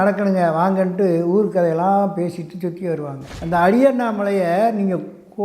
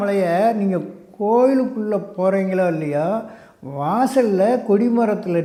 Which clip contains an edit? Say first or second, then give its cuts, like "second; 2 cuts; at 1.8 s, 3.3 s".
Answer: first; 1 cut; at 3.3 s